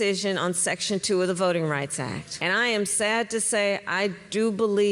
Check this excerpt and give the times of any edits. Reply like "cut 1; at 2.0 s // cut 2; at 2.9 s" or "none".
cut 1; at 2.3 s